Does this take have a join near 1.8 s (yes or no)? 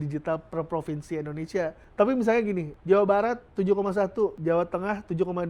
yes